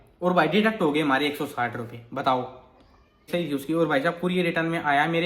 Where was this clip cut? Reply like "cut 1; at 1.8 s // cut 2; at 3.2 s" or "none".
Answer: cut 1; at 3.3 s